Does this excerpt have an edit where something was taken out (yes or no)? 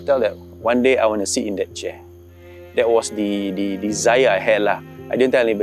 no